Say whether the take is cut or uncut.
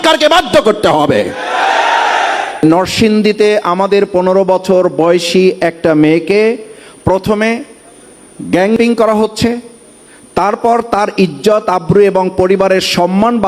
cut